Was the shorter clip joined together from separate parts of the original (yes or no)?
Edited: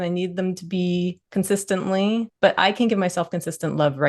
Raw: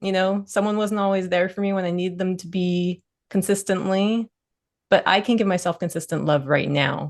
yes